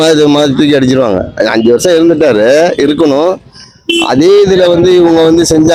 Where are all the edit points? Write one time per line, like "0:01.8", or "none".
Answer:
none